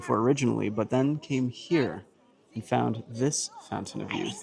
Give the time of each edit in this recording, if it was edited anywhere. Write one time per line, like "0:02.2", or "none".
none